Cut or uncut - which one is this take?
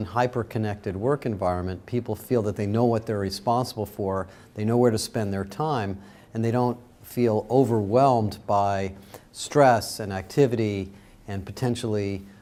uncut